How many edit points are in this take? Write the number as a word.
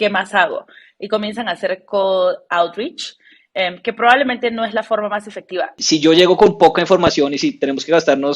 one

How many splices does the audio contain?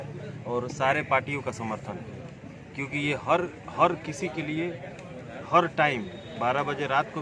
zero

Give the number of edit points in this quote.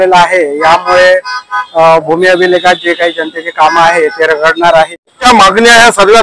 one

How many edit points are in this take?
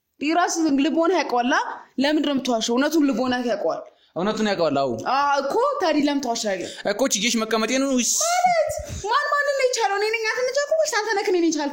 zero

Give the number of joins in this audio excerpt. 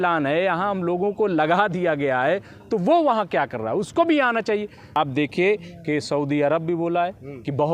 one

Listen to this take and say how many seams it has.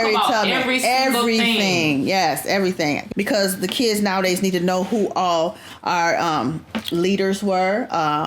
one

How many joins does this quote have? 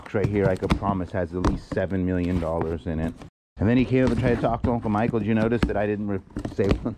one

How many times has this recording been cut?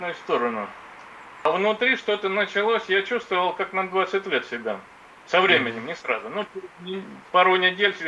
one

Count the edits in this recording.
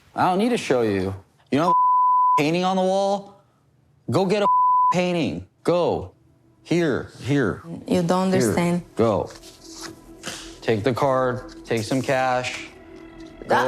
three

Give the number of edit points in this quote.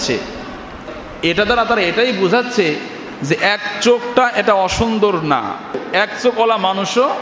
zero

